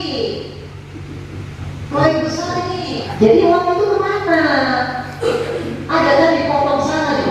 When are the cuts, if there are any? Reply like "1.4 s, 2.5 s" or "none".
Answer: 3.0 s